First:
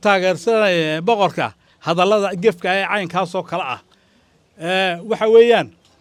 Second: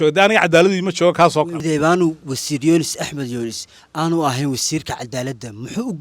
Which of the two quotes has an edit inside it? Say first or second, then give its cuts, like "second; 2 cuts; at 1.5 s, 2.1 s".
second; 1 cut; at 1.6 s